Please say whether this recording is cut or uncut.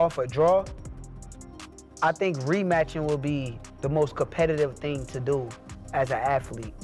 uncut